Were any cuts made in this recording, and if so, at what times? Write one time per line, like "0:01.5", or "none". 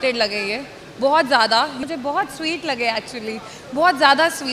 0:01.8